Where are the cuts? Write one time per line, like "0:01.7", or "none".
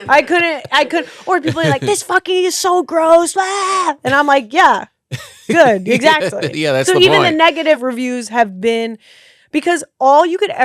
0:07.8

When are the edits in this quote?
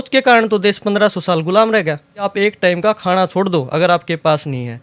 0:02.2

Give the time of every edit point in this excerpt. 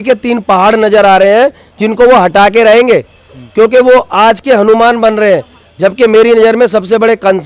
none

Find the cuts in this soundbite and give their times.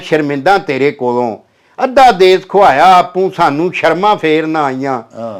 none

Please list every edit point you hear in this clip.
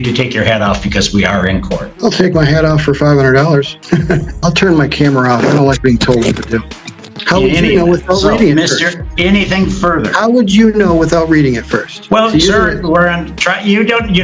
0:04.3
0:07.1
0:12.0

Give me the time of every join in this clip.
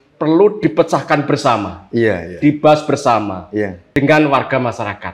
0:03.9

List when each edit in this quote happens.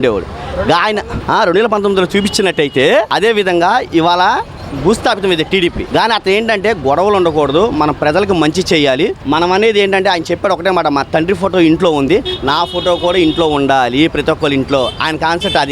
0:01.1
0:03.1
0:05.8
0:09.2

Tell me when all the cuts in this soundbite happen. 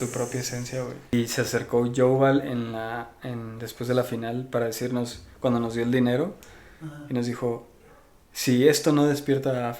0:01.1

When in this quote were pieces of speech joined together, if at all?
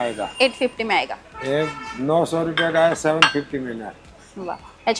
0:01.2

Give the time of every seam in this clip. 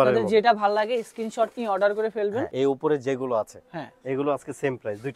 0:02.5

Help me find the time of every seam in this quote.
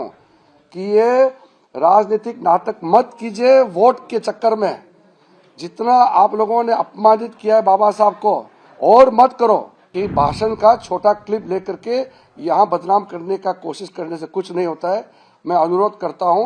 0:09.8

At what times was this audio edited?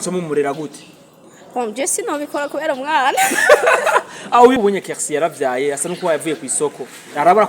0:04.6

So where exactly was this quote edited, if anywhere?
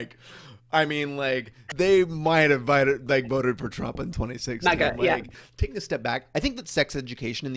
0:01.6
0:05.3

